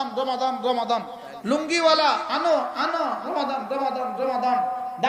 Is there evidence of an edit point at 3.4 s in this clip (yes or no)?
no